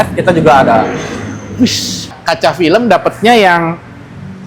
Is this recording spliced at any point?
yes; 1 cut; at 2.1 s

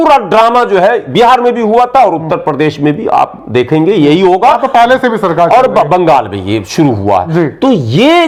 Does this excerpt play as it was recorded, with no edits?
yes; 0 cuts

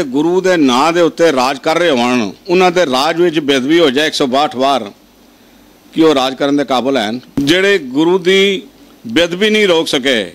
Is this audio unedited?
no; 1 cut; at 7.2 s

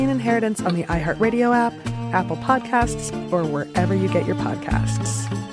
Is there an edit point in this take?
no; 0 cuts

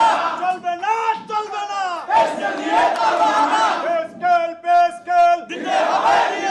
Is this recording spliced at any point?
no; 0 cuts

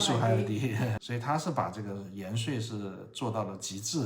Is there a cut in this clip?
yes; 1 cut; at 1.0 s

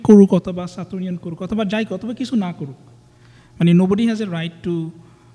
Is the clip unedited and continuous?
yes; 0 cuts

